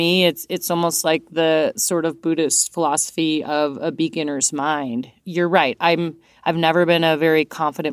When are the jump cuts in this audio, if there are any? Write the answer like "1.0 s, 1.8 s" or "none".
none